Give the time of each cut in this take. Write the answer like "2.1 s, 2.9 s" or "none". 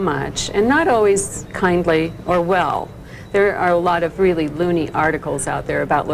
1.1 s